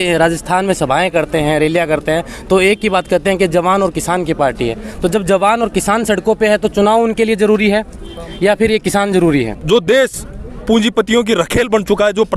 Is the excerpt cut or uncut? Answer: cut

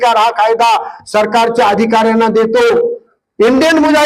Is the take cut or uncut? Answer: cut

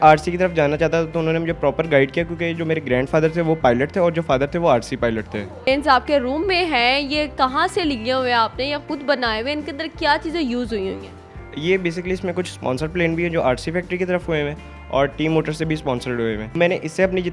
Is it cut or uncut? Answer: cut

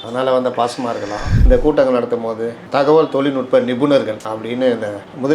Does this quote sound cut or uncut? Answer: cut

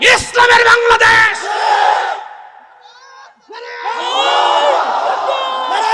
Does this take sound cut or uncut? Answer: uncut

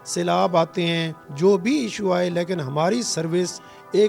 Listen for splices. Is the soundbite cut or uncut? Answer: cut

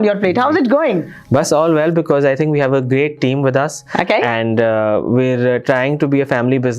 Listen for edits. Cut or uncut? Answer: uncut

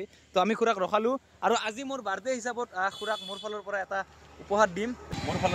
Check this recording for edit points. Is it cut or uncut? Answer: uncut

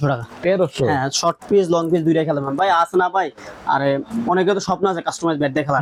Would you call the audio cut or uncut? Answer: uncut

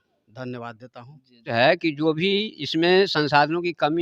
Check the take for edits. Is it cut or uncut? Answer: cut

